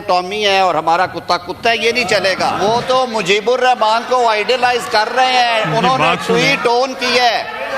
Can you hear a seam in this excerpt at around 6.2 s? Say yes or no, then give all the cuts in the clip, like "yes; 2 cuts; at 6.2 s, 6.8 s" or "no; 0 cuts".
no; 1 cut; at 2.6 s